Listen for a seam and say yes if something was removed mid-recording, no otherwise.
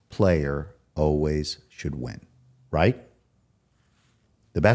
no